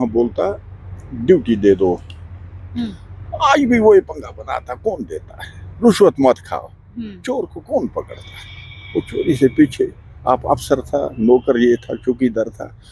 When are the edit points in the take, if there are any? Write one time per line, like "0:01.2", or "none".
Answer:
none